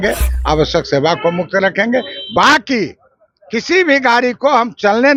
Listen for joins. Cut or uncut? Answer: uncut